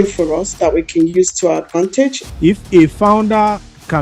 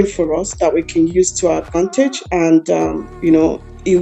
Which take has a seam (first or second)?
first